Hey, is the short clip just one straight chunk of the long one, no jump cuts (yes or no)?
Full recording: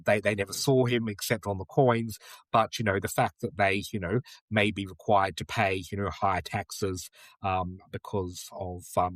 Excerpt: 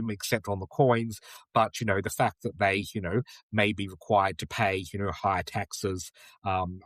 yes